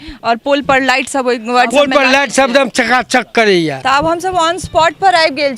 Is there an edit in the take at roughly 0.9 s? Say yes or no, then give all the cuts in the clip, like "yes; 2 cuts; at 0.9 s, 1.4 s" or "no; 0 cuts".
no; 1 cut; at 3.8 s